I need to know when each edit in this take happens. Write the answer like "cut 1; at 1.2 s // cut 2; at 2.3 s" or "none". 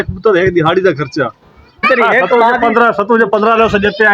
cut 1; at 1.8 s